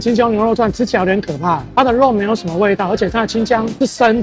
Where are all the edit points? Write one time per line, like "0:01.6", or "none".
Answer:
none